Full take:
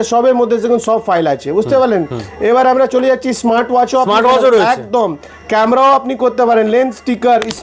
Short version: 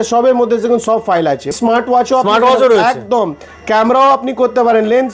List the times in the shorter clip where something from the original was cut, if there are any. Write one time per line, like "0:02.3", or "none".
0:01.5